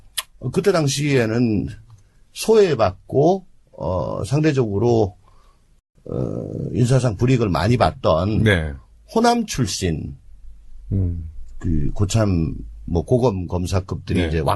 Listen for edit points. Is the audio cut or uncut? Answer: cut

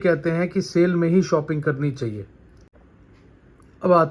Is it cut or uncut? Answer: cut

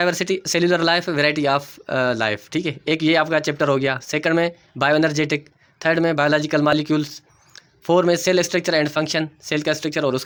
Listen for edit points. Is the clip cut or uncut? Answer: uncut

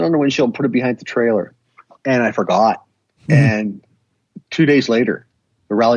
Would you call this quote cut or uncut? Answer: uncut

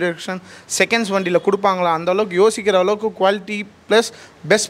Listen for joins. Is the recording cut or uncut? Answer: uncut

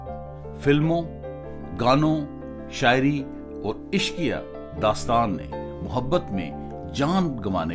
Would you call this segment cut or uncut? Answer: uncut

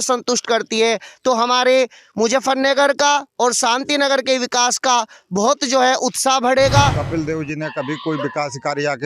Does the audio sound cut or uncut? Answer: cut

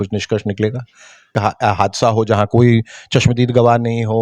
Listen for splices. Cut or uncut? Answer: cut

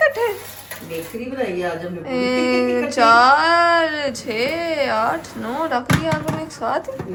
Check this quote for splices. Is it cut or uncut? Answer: uncut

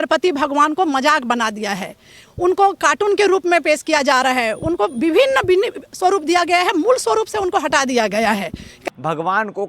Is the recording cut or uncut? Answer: cut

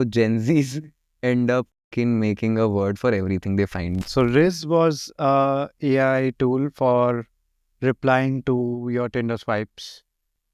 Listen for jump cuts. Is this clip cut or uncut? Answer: uncut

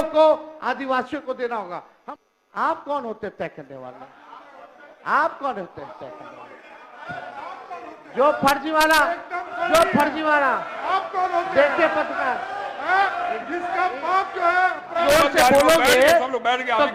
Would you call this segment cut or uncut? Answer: cut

